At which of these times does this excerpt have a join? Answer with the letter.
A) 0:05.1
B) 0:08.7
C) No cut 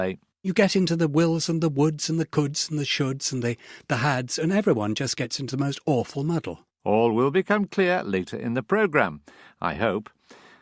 A